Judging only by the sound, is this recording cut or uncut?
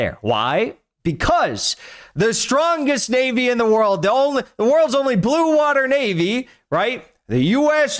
uncut